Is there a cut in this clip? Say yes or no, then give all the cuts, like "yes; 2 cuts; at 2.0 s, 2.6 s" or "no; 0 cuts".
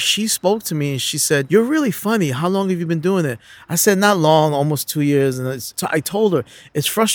yes; 2 cuts; at 1.5 s, 5.7 s